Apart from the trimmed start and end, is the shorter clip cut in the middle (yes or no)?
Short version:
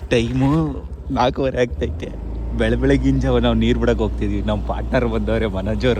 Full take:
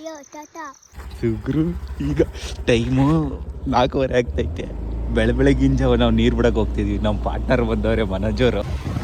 no